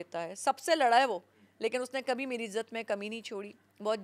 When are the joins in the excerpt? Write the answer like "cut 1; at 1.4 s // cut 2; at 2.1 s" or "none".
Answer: none